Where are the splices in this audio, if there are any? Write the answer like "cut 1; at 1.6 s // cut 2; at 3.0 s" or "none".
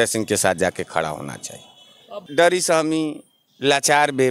cut 1; at 2.2 s

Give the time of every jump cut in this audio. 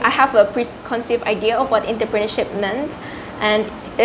none

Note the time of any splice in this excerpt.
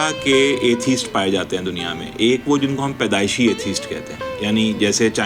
none

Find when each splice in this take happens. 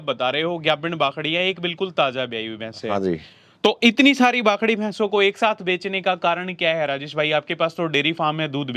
none

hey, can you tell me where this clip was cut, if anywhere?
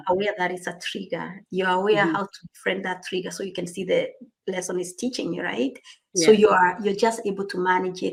none

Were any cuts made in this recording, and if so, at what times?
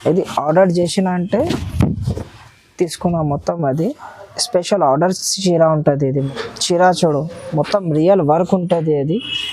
cut 1; at 6.3 s

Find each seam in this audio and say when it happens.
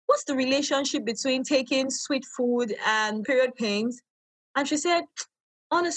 cut 1; at 3.2 s

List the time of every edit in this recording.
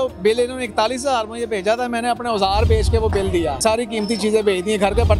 cut 1; at 3.6 s

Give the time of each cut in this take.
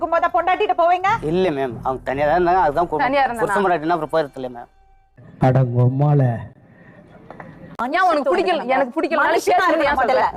none

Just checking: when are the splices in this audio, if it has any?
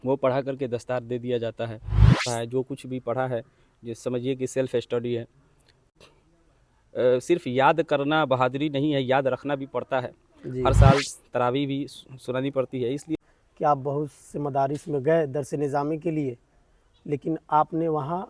cut 1; at 2.3 s // cut 2; at 5.9 s // cut 3; at 13.2 s

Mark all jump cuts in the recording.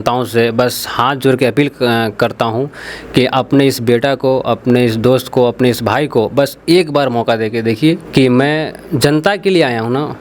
cut 1; at 8.0 s

